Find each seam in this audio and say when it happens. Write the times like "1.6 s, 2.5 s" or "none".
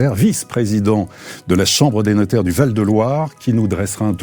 none